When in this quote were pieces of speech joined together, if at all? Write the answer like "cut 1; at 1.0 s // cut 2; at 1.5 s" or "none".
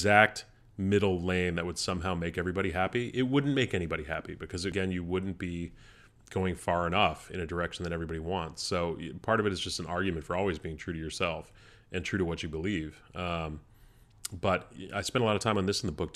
cut 1; at 4.7 s